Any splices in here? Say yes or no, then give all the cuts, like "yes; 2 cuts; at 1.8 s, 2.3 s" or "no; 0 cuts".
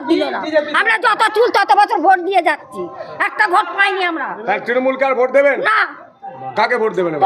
no; 0 cuts